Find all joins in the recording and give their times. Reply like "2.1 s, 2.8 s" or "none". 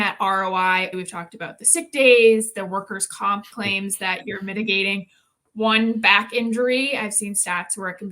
0.9 s